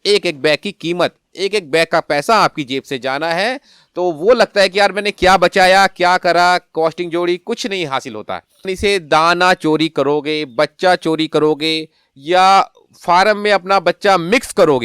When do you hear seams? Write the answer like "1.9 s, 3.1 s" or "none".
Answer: 8.7 s